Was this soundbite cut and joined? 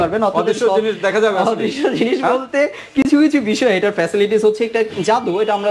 no; 0 cuts

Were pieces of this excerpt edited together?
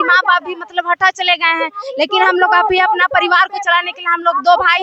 no; 0 cuts

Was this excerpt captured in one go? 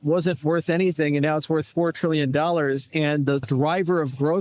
no; 1 cut; at 3.4 s

